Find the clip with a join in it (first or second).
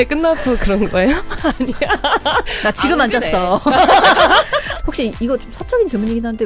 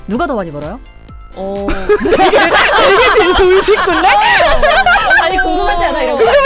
first